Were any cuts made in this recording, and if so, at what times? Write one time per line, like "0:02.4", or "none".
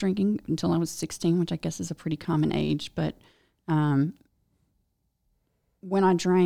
none